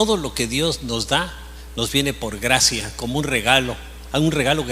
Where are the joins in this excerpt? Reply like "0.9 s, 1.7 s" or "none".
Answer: 2.1 s